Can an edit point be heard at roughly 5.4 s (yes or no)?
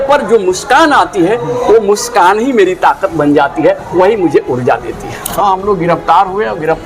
yes